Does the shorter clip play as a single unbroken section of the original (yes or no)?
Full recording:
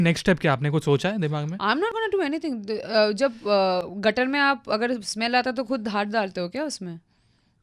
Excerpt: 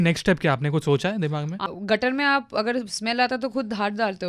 no